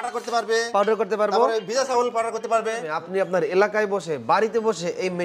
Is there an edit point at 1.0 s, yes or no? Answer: no